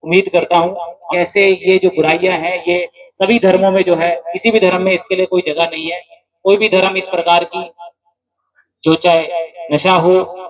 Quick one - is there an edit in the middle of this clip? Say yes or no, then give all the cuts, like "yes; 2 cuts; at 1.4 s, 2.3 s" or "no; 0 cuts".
yes; 1 cut; at 1.0 s